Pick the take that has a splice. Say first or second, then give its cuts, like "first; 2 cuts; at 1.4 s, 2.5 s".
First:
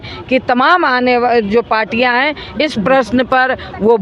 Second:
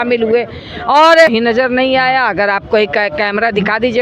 second; 1 cut; at 1.3 s